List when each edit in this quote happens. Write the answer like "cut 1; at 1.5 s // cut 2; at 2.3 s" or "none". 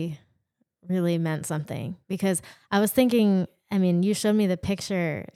none

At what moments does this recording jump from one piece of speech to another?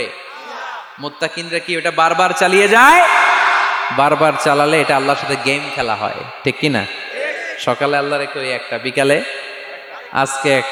none

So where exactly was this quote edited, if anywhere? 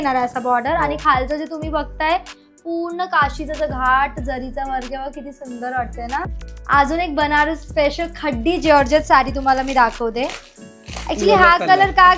cut 1; at 6.2 s

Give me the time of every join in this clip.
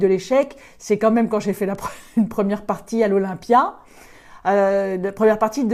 none

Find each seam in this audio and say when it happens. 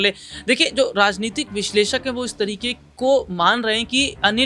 none

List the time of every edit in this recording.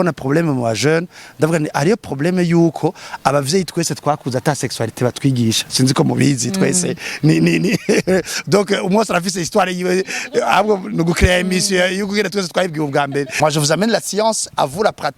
cut 1; at 13.3 s

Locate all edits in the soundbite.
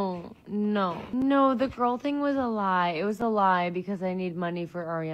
cut 1; at 1.0 s

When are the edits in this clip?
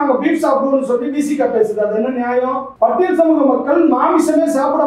cut 1; at 2.7 s

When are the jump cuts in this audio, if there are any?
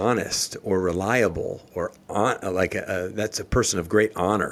none

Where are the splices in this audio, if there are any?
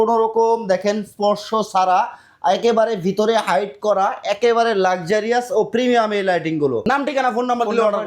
cut 1; at 6.8 s

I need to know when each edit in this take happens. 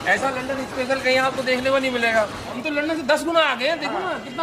cut 1; at 2.6 s

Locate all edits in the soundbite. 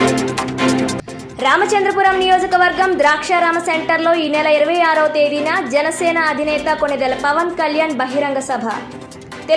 cut 1; at 0.9 s

